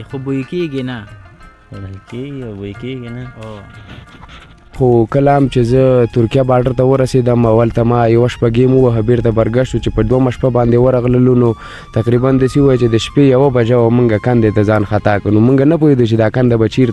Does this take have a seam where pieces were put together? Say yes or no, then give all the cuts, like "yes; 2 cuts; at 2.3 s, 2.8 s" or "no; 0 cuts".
yes; 1 cut; at 4.8 s